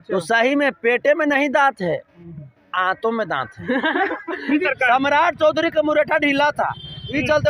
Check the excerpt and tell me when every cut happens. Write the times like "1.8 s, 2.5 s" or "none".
4.6 s